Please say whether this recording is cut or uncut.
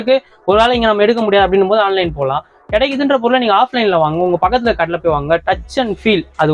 uncut